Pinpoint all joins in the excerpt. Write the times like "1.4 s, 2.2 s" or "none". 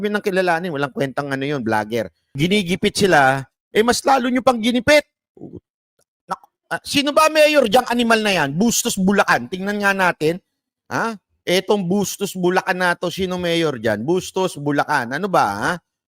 2.3 s